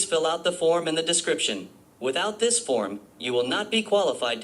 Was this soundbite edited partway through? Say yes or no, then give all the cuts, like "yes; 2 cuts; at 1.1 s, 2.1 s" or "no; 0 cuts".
no; 0 cuts